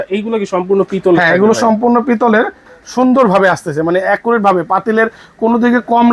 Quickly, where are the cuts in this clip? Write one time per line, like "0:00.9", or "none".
0:02.7